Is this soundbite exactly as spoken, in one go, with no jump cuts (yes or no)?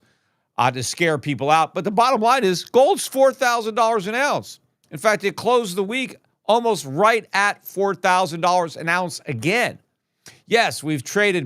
yes